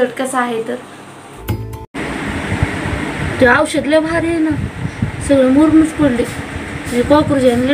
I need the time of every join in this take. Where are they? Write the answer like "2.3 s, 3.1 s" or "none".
1.3 s